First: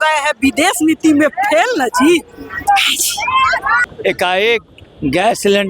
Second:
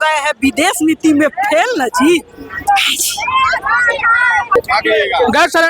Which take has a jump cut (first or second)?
first